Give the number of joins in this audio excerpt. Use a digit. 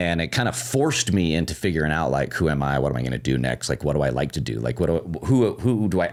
0